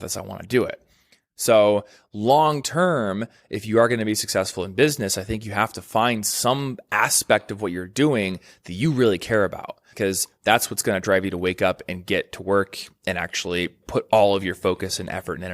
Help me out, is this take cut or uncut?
cut